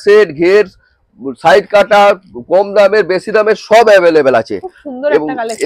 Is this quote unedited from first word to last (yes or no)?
yes